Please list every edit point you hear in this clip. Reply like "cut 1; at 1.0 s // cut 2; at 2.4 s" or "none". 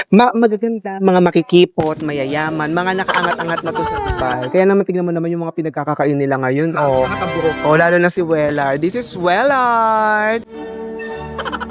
none

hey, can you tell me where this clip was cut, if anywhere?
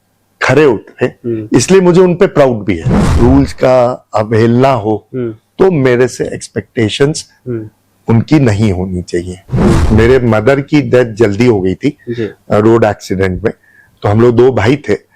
cut 1; at 3.0 s // cut 2; at 9.8 s

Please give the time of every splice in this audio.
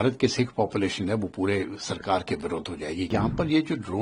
cut 1; at 3.1 s

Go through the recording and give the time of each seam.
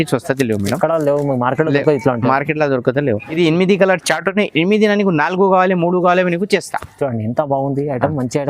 cut 1; at 3.3 s

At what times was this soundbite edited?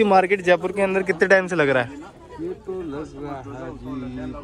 none

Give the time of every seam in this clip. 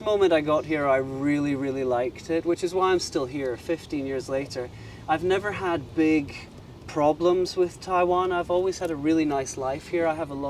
none

